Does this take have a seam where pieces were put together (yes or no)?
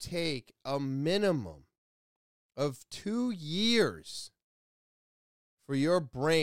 no